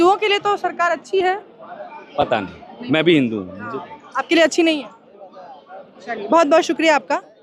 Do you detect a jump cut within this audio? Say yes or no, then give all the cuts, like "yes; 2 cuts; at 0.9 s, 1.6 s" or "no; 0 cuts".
no; 0 cuts